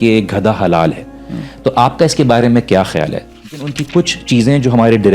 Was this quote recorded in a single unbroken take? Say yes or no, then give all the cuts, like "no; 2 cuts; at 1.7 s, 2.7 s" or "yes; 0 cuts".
no; 1 cut; at 3.5 s